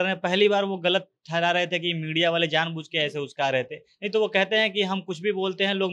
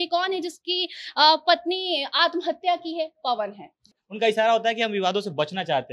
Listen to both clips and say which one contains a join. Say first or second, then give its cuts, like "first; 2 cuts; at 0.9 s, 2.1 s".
second; 1 cut; at 3.9 s